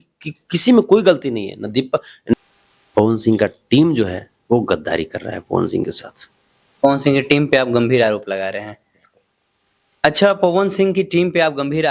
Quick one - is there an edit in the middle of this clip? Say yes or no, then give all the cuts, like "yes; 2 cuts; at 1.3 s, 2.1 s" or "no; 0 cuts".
yes; 1 cut; at 2.3 s